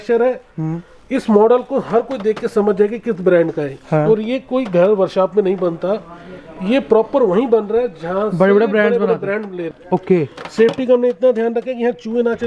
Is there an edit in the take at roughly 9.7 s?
yes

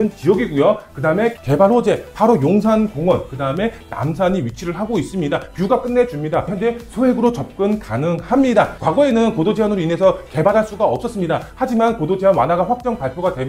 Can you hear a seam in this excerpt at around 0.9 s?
no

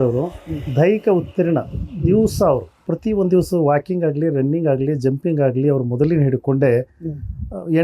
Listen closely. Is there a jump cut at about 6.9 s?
no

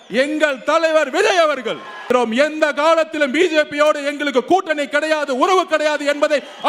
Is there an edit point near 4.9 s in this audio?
no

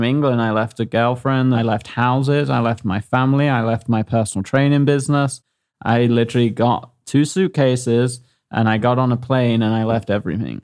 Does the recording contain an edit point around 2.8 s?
no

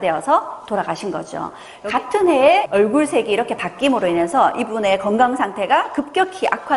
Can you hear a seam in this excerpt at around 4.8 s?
no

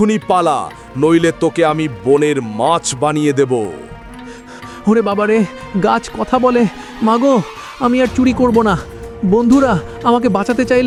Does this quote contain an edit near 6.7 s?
no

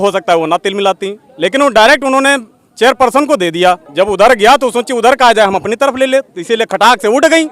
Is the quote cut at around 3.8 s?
yes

